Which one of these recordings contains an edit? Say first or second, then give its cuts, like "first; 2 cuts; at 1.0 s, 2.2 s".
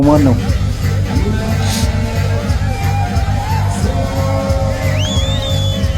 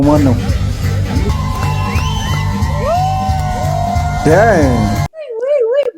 second; 2 cuts; at 1.3 s, 4.8 s